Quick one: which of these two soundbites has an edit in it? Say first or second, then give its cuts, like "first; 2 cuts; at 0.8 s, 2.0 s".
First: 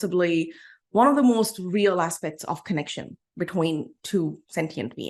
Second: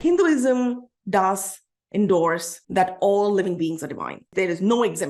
second; 2 cuts; at 2.5 s, 4.3 s